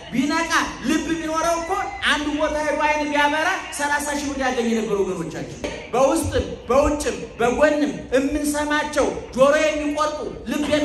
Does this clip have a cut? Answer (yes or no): yes